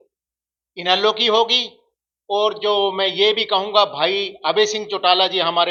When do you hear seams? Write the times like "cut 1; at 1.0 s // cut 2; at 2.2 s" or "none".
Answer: none